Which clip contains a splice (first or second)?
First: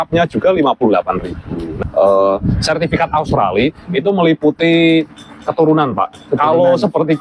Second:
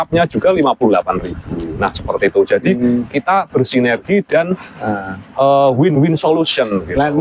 first